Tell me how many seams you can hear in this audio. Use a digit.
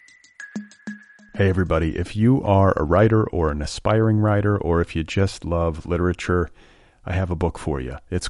1